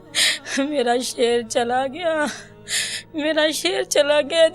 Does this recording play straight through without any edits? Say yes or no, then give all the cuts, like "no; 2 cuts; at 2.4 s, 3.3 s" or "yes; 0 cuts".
no; 1 cut; at 2.7 s